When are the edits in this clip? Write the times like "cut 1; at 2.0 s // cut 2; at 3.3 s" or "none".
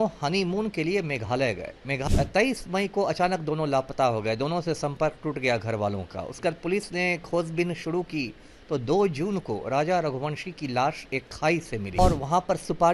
cut 1; at 2.0 s // cut 2; at 12.0 s